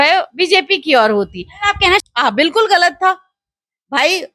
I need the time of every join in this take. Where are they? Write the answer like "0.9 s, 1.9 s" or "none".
2.0 s